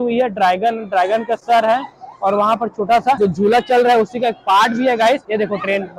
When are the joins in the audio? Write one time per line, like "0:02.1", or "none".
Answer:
none